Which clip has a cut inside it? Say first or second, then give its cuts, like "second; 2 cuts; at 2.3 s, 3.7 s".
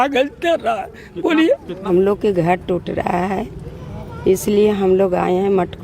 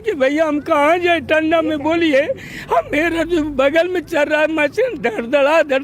first; 1 cut; at 1.9 s